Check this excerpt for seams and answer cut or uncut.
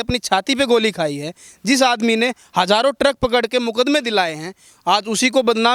uncut